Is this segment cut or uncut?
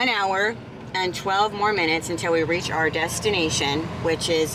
uncut